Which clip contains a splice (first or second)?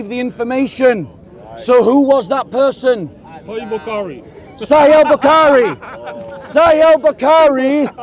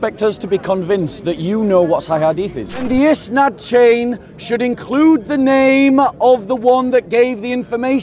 second